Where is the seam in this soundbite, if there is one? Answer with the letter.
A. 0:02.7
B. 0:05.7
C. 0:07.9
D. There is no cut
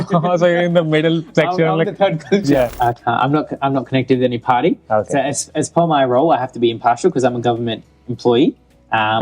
A